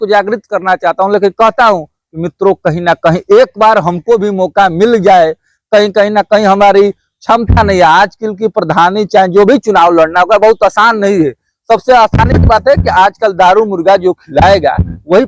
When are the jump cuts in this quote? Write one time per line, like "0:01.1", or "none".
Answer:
none

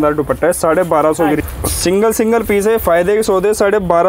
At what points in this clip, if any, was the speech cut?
0:01.4

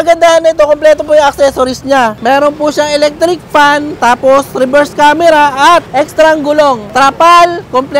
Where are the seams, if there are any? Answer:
0:02.2
0:05.9
0:06.8

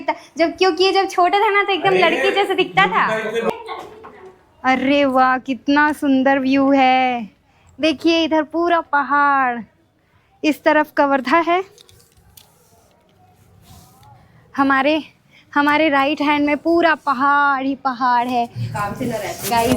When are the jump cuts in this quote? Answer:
0:03.5
0:18.6

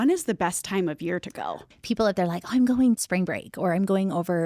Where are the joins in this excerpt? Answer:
0:01.7
0:03.0

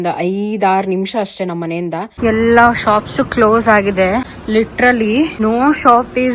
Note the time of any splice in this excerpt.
0:02.1
0:04.4
0:05.4

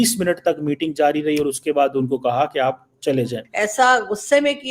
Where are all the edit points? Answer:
0:03.4

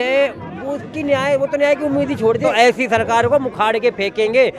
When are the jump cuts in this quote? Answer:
0:02.5

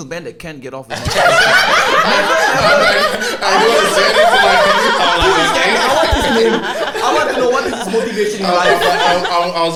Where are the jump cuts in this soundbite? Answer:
none

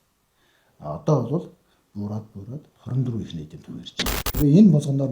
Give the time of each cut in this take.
0:04.2

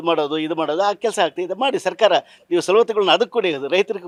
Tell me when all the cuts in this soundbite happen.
none

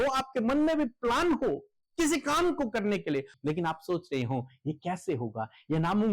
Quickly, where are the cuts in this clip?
0:03.3

